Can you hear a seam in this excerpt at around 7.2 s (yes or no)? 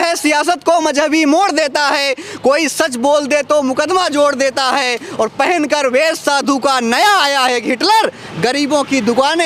no